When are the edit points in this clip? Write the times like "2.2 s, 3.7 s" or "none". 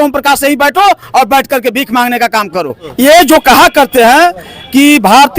2.8 s